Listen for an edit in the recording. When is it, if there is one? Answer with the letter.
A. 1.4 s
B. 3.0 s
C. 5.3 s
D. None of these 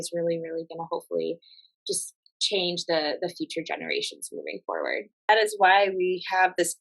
C